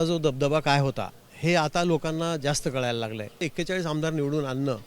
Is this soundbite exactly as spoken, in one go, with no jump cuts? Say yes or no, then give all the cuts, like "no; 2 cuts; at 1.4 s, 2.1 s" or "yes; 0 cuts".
no; 1 cut; at 3.4 s